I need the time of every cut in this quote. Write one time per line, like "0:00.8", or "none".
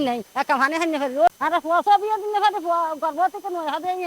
0:01.3